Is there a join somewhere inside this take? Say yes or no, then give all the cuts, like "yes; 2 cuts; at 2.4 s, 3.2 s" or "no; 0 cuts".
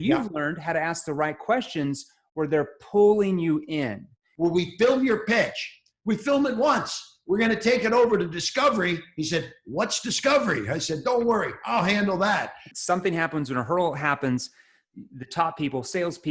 yes; 2 cuts; at 4.2 s, 12.7 s